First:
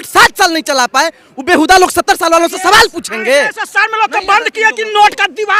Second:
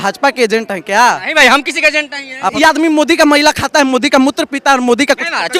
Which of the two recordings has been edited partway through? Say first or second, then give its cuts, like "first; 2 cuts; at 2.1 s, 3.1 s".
second; 1 cut; at 2.5 s